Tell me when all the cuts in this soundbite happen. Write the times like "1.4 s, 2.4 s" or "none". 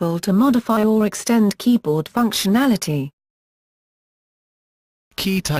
none